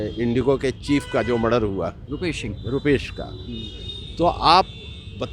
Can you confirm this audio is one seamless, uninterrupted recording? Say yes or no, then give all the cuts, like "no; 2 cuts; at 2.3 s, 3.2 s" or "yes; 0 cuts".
yes; 0 cuts